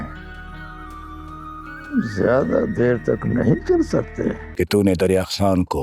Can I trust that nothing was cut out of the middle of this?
no; 1 cut; at 4.4 s

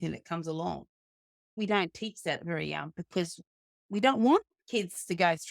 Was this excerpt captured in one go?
no; 1 cut; at 1.5 s

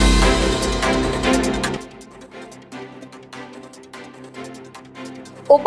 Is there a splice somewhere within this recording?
no; 0 cuts

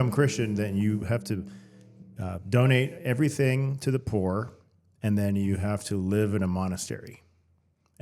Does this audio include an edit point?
no; 0 cuts

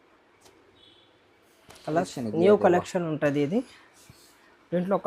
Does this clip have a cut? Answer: yes; 1 cut; at 2.1 s

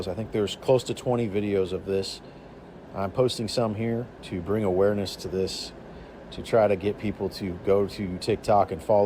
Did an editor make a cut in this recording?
no; 0 cuts

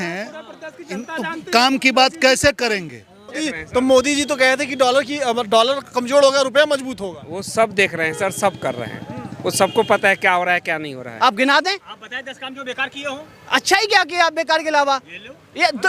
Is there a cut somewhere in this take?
yes; 2 cuts; at 3.5 s, 11.0 s

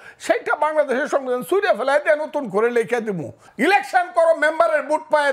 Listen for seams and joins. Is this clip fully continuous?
no; 1 cut; at 3.4 s

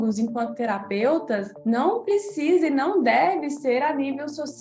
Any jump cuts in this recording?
no; 0 cuts

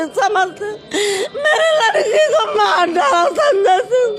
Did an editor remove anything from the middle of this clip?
no; 0 cuts

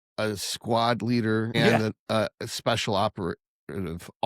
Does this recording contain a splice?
yes; 1 cut; at 1.8 s

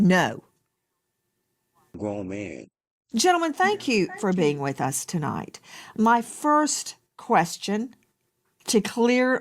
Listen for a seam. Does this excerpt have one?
yes; 1 cut; at 1.9 s

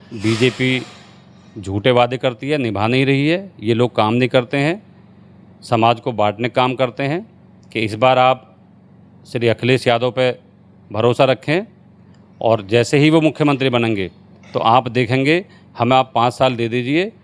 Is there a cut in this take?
no; 0 cuts

